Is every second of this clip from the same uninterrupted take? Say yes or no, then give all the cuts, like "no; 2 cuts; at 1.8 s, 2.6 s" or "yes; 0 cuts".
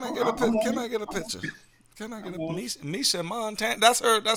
yes; 0 cuts